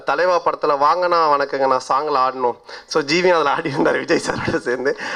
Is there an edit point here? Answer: no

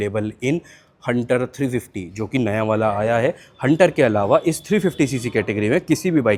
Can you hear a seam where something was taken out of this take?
no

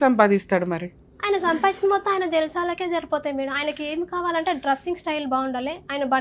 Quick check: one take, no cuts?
yes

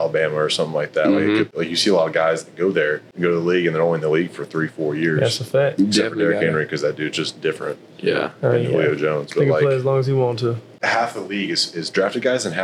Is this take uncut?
no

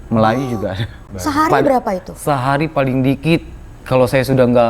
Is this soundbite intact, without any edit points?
no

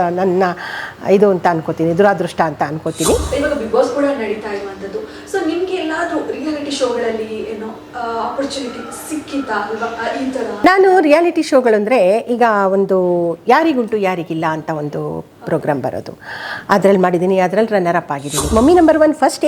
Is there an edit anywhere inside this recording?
yes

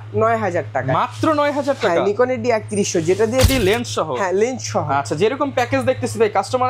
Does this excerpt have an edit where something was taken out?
yes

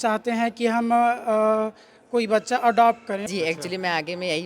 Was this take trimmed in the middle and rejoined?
yes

